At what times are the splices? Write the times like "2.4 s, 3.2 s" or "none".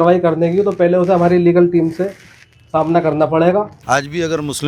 3.8 s